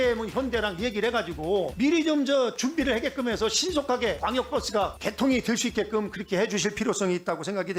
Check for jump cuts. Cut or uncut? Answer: uncut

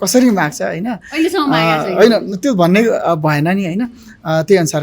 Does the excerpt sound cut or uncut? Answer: uncut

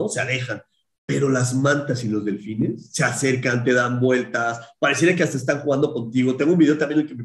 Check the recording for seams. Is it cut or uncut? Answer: uncut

